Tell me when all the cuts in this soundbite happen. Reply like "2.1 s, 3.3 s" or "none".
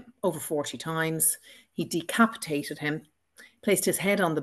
none